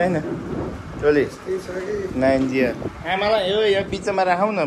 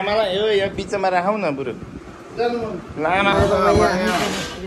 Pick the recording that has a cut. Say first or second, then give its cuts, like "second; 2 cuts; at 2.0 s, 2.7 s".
second; 1 cut; at 3.3 s